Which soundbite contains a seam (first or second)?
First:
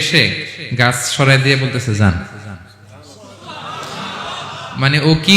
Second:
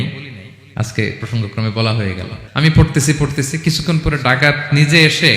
second